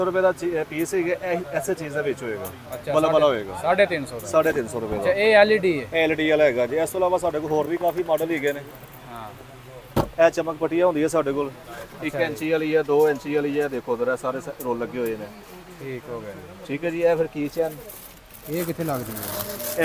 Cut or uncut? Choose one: uncut